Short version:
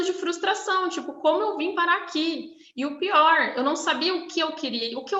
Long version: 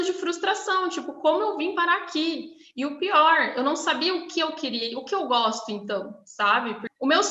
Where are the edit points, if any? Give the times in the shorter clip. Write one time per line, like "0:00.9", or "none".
none